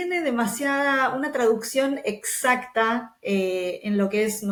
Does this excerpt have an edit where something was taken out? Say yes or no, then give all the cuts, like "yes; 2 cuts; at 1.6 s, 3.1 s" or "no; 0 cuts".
no; 0 cuts